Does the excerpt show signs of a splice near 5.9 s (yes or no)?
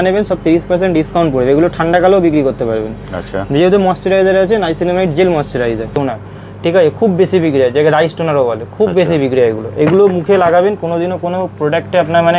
yes